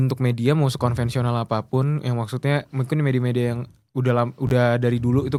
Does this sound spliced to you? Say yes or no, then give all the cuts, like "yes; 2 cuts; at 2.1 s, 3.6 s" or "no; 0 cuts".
no; 0 cuts